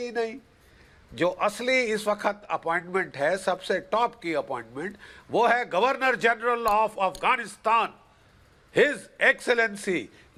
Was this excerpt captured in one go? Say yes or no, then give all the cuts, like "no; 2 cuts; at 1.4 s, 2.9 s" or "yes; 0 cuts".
yes; 0 cuts